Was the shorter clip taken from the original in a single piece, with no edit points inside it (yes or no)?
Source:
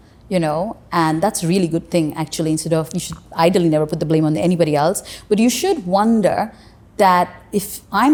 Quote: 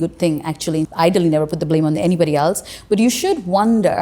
no